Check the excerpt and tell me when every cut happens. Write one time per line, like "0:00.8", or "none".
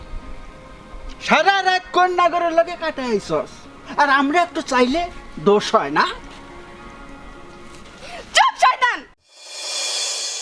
0:09.0